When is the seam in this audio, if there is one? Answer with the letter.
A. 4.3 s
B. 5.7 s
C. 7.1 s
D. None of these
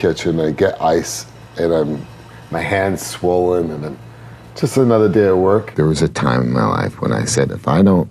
B